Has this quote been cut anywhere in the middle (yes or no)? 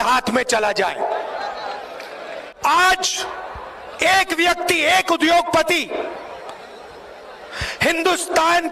yes